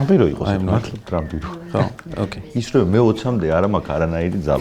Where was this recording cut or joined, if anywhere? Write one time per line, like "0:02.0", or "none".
none